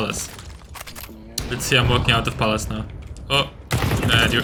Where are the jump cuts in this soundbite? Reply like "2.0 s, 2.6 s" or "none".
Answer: none